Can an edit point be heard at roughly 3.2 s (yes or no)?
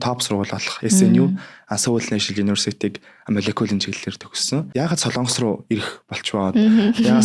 no